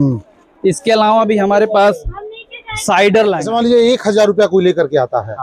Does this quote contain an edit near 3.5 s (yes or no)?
yes